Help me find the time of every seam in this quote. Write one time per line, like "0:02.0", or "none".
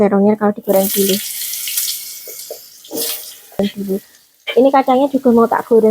0:03.6